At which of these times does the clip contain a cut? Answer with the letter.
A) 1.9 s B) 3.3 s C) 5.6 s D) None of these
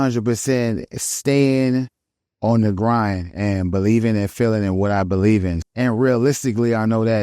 C